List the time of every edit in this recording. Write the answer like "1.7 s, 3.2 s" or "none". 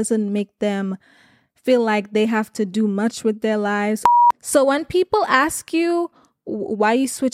4.0 s